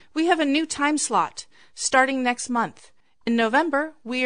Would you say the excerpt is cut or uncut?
cut